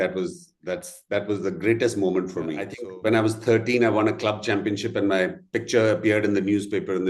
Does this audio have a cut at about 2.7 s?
yes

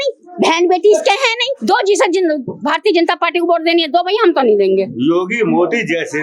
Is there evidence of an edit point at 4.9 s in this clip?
yes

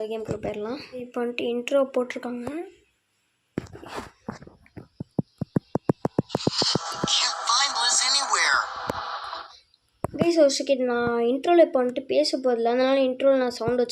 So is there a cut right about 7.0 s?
no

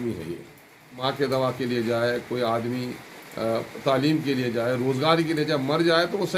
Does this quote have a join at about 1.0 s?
yes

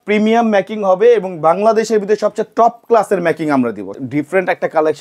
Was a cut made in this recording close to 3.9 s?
yes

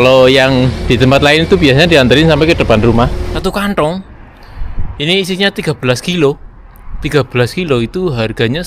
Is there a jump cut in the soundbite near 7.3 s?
no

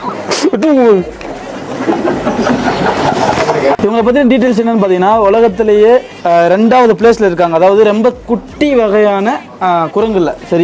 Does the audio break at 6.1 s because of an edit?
yes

